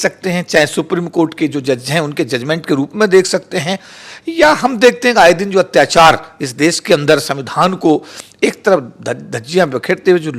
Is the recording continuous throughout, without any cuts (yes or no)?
yes